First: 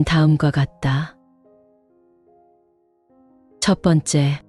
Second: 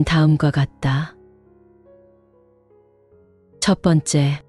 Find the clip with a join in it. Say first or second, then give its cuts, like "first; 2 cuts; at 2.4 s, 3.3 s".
second; 2 cuts; at 1.1 s, 3.6 s